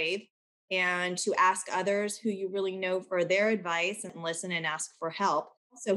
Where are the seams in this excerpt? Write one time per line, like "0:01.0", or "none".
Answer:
0:04.1